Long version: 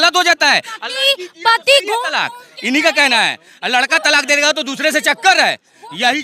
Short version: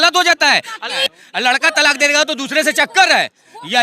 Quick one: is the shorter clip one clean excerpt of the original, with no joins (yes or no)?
no